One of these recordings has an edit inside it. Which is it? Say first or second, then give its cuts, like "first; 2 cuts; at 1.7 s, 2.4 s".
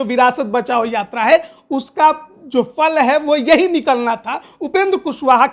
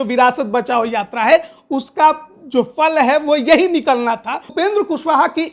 second; 1 cut; at 4.5 s